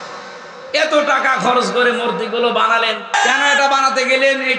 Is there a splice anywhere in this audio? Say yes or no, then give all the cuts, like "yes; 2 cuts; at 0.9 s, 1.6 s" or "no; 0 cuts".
yes; 1 cut; at 3.1 s